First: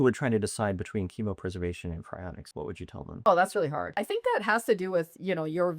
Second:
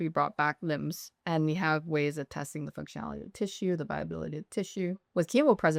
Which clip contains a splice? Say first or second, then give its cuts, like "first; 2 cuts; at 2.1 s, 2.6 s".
first; 2 cuts; at 2.9 s, 4.0 s